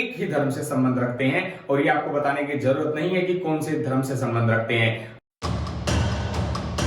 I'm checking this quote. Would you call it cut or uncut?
cut